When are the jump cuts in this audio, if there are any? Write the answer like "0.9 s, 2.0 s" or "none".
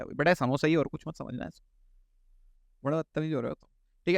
none